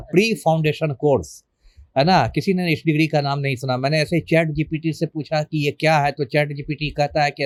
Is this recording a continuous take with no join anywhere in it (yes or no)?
yes